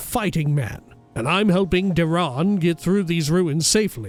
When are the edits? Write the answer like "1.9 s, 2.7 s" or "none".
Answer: none